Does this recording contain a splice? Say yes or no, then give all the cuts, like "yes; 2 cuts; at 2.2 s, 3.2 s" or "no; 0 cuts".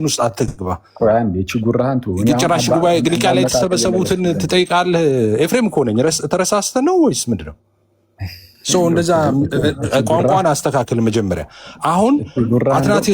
no; 0 cuts